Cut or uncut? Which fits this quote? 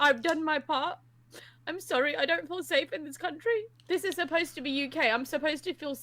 cut